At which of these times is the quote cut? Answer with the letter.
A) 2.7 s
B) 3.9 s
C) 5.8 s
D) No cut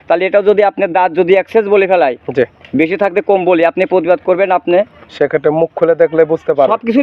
D